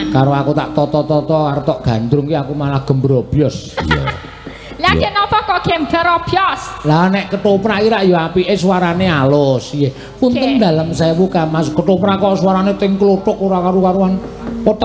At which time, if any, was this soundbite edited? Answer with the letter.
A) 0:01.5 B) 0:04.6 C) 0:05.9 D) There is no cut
D